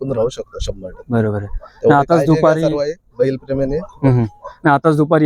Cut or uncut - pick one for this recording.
uncut